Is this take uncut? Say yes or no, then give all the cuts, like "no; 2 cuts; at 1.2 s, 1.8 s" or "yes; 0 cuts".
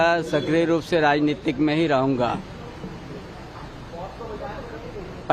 yes; 0 cuts